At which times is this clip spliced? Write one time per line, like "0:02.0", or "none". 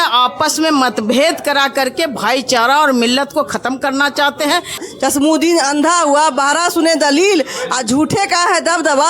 0:04.8